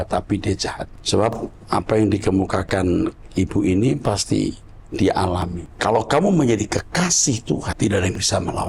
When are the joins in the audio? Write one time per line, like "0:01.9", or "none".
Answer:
0:00.9
0:05.6
0:07.7